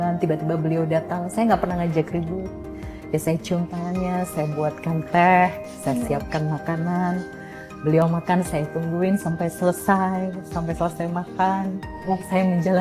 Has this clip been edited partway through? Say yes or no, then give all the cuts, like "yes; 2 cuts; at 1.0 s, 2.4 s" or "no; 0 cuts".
no; 0 cuts